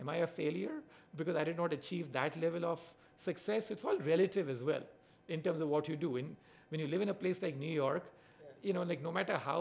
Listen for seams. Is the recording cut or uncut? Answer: uncut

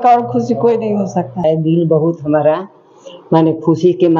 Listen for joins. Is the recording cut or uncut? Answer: cut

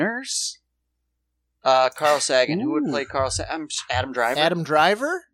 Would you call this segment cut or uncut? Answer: uncut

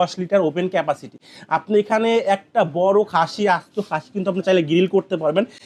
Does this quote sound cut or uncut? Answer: uncut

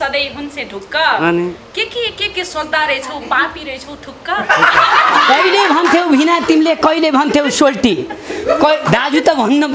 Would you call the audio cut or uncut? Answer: uncut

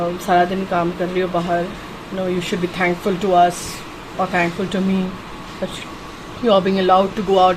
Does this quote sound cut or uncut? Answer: uncut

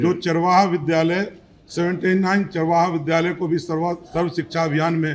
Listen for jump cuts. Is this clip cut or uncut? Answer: uncut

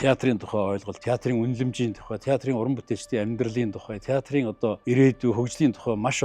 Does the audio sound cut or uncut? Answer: cut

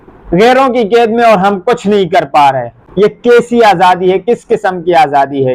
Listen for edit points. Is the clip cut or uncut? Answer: uncut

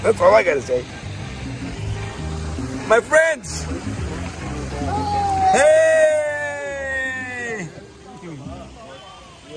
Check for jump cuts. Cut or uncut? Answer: uncut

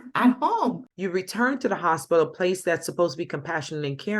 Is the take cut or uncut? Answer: cut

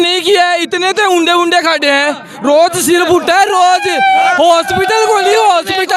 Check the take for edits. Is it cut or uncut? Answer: uncut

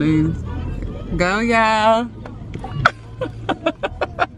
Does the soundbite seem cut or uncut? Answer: uncut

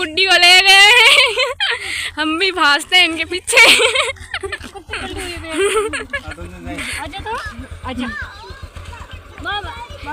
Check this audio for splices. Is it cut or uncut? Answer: uncut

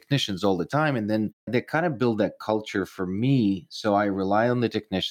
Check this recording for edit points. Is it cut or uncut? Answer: cut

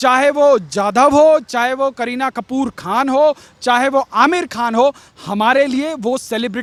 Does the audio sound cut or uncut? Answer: uncut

